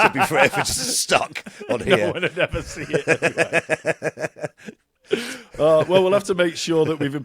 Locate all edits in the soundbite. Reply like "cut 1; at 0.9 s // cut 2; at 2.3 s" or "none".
none